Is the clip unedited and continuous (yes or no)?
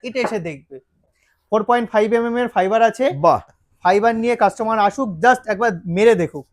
no